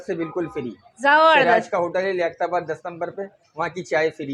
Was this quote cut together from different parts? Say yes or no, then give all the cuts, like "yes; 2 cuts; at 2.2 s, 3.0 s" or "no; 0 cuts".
no; 0 cuts